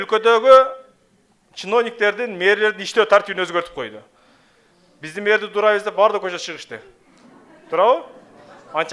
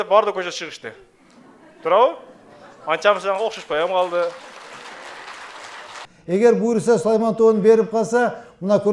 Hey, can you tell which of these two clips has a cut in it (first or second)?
second